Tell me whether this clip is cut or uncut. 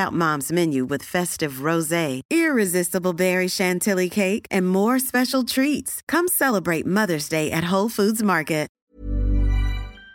cut